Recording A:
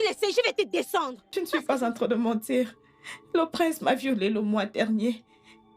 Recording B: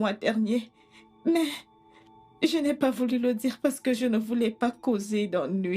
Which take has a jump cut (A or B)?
A